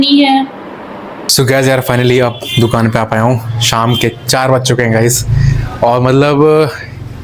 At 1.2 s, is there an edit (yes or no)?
yes